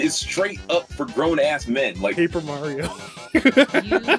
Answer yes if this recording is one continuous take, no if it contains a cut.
no